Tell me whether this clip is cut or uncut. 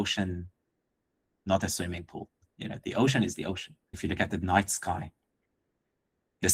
uncut